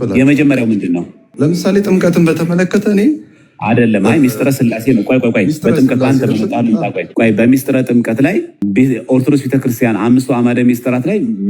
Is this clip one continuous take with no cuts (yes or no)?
no